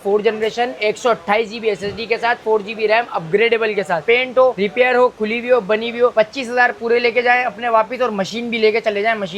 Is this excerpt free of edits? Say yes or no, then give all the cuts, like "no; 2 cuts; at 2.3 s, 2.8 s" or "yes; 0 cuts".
no; 1 cut; at 4.0 s